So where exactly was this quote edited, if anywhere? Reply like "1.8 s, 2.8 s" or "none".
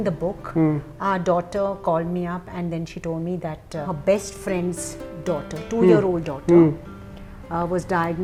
none